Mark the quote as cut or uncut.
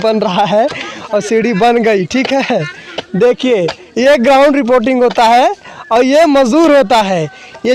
uncut